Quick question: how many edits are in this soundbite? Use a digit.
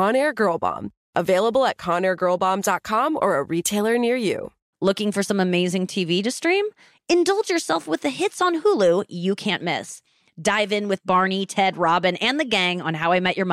1